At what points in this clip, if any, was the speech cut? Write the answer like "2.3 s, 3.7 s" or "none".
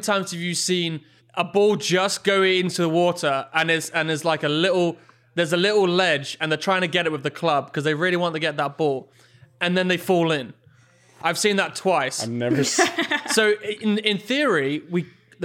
none